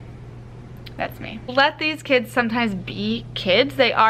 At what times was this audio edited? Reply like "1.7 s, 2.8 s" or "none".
1.5 s